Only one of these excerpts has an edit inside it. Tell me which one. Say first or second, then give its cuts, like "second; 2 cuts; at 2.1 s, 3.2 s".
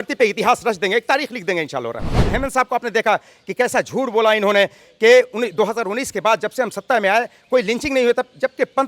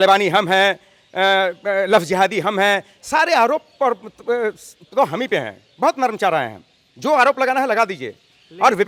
first; 1 cut; at 2.2 s